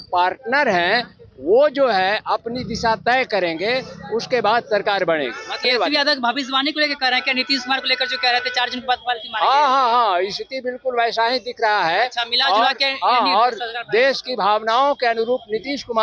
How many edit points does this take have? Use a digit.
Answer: 1